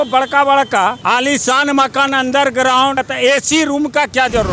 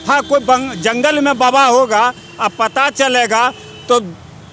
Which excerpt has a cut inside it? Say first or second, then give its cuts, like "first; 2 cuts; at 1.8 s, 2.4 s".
first; 2 cuts; at 1.0 s, 3.0 s